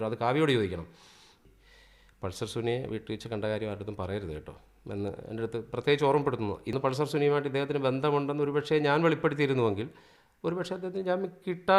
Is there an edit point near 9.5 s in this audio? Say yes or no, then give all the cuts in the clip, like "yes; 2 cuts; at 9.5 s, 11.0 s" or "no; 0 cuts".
no; 2 cuts; at 1.4 s, 6.7 s